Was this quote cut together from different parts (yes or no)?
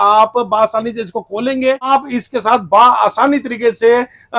yes